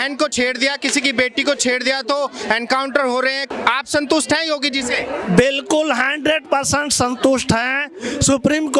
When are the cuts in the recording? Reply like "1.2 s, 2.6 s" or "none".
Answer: 3.5 s